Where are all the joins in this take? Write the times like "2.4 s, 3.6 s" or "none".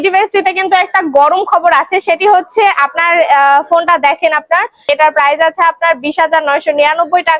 4.8 s